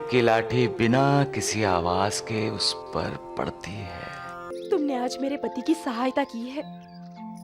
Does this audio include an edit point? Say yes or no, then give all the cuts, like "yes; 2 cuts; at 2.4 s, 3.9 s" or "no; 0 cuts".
yes; 1 cut; at 4.5 s